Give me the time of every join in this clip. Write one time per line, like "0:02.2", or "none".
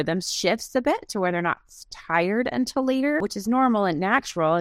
0:03.3